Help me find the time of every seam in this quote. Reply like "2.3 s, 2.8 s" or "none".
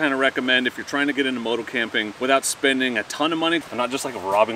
2.1 s, 3.6 s